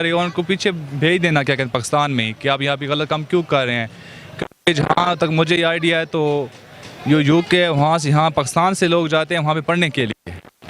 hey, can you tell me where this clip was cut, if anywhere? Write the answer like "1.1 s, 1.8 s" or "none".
none